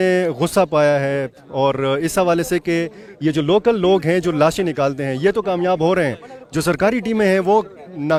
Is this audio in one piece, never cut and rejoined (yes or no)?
yes